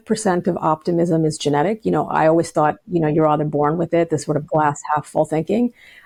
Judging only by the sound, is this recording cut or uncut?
uncut